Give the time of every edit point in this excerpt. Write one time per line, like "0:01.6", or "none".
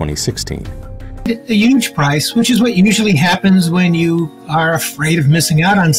0:01.3